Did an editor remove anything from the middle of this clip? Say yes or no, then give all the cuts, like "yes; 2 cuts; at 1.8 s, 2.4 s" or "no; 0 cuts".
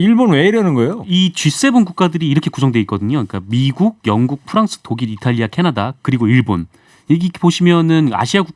yes; 1 cut; at 1.0 s